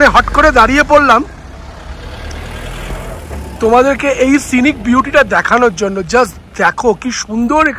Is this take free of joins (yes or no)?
yes